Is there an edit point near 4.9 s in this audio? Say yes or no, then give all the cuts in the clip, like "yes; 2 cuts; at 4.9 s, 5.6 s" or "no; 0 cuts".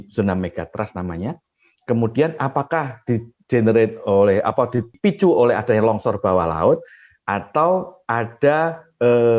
yes; 1 cut; at 4.9 s